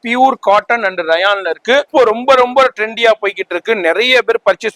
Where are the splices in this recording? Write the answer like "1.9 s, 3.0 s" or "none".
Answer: 1.9 s